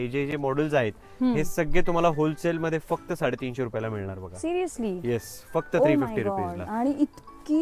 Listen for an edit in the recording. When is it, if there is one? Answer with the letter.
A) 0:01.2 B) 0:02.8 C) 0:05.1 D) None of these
D